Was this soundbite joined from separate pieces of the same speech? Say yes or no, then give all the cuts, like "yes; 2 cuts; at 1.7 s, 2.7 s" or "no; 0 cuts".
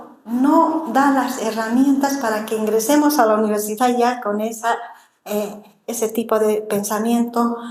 no; 0 cuts